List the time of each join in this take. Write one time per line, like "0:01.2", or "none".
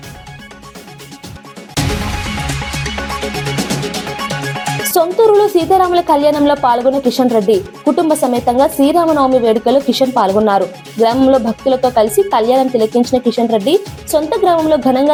none